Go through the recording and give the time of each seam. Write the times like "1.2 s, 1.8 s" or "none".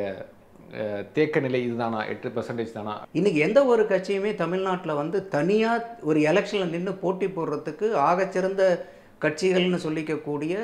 3.0 s

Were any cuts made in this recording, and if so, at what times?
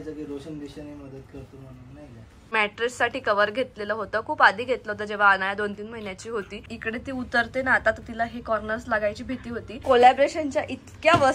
2.4 s, 6.8 s, 9.8 s

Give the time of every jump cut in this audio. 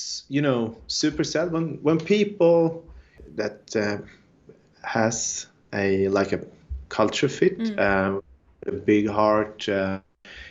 none

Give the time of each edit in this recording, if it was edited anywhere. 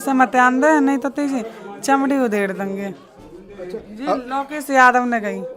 none

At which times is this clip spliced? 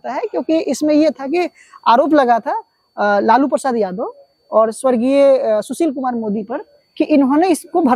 none

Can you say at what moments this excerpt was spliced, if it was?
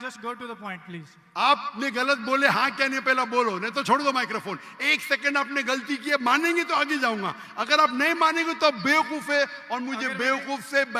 none

